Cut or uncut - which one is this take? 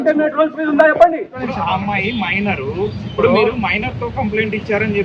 cut